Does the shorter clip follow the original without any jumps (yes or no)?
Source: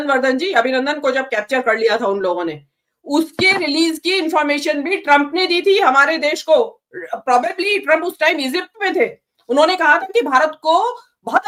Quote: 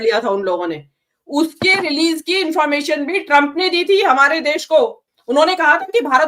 no